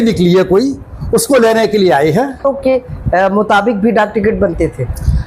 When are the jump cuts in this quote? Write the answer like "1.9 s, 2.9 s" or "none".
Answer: 2.4 s

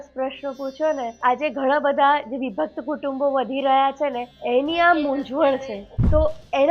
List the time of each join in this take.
1.2 s, 4.3 s, 5.7 s

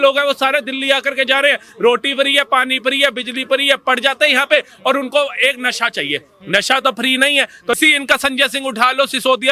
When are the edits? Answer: 7.8 s

